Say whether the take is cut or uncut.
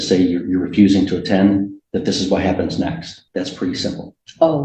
cut